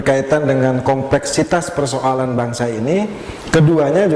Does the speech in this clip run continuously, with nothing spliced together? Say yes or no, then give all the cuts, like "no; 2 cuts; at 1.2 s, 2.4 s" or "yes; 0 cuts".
yes; 0 cuts